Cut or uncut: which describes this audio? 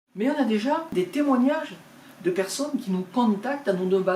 cut